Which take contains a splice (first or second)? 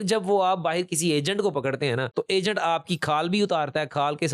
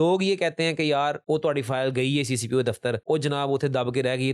second